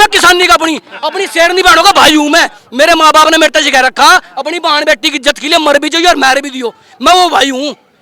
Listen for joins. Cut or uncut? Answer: uncut